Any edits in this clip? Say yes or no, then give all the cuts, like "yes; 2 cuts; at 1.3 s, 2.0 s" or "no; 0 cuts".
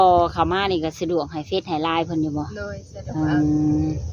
no; 0 cuts